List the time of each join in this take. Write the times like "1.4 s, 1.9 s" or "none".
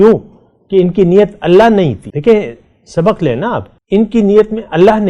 2.1 s, 3.7 s